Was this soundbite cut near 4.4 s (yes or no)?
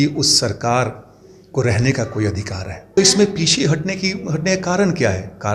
no